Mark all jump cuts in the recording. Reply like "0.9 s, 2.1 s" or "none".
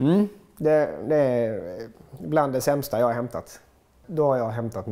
4.0 s